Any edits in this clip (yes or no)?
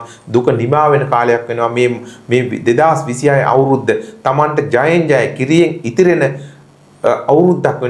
no